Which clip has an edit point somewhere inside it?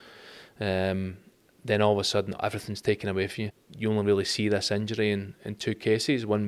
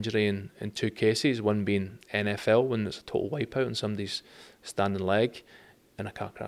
first; 1 cut; at 3.6 s

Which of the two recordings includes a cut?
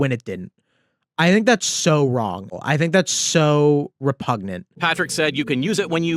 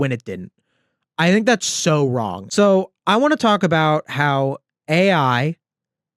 second; 1 cut; at 2.4 s

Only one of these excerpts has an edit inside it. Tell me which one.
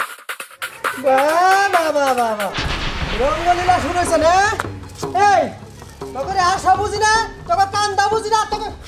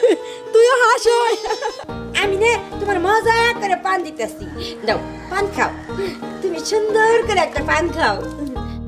second; 1 cut; at 1.8 s

